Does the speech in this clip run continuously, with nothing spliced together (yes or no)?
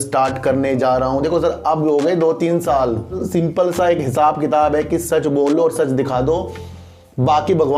no